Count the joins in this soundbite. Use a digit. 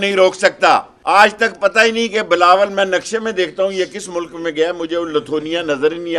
1